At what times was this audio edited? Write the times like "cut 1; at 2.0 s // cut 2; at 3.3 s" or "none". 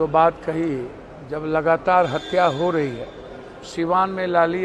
none